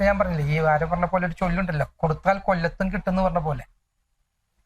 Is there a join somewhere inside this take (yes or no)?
no